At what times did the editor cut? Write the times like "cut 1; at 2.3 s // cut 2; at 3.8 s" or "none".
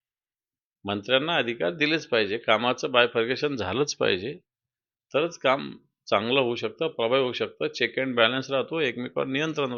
none